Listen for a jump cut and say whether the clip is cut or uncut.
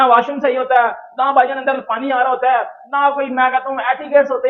uncut